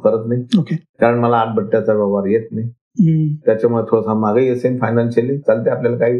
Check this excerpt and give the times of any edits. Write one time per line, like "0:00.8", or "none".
none